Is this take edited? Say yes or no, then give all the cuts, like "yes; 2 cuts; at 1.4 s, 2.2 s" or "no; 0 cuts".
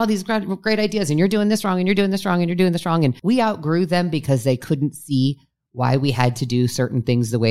yes; 1 cut; at 3.2 s